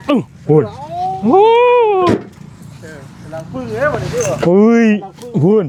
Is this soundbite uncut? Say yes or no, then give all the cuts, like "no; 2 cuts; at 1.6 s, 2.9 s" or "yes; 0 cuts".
yes; 0 cuts